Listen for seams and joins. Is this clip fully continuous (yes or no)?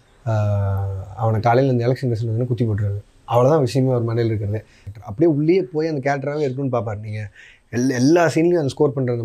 no